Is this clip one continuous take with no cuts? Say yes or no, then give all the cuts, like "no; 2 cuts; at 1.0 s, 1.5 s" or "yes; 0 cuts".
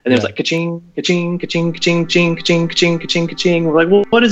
yes; 0 cuts